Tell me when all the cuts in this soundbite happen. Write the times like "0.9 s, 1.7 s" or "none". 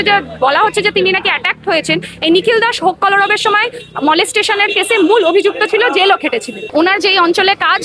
6.7 s

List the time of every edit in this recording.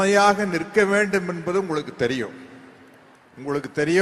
none

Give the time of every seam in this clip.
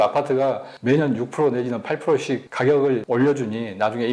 2.5 s, 3.0 s

